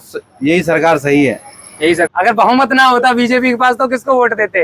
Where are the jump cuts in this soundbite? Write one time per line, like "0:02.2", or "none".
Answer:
0:02.1

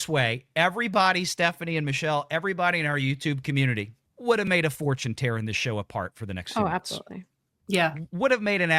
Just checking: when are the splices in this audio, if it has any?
0:04.0

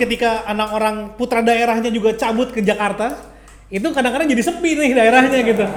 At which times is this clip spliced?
none

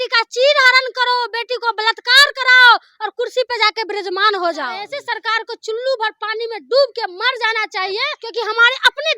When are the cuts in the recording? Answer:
0:04.9
0:08.2

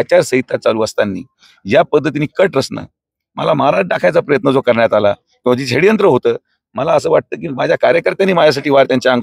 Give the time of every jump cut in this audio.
none

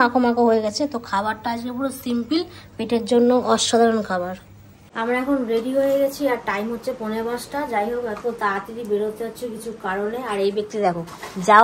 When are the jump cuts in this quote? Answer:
none

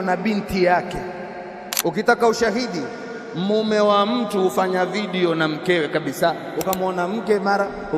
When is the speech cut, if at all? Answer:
none

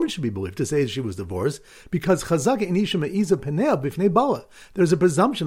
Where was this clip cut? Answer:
0:01.6

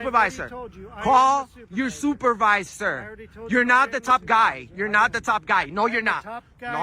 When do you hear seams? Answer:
none

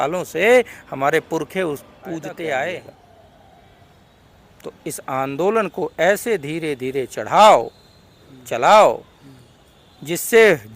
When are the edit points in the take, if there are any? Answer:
0:02.9

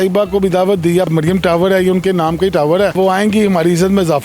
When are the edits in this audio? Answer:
0:01.1
0:02.9

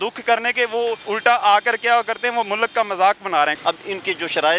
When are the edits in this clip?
0:01.0
0:03.6

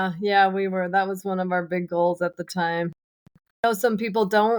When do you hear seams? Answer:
0:03.6

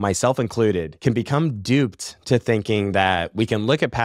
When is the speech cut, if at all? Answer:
0:00.9

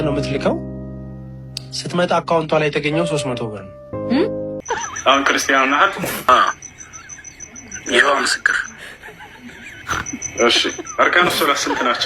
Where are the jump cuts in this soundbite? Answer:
0:04.6
0:06.3

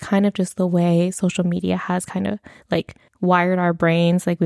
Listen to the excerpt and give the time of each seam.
0:03.0

